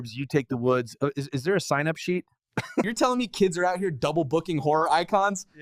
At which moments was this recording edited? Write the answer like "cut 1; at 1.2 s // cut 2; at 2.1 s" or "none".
cut 1; at 2.8 s